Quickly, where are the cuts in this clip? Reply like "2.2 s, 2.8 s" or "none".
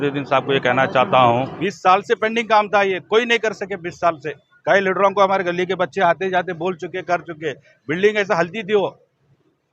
1.5 s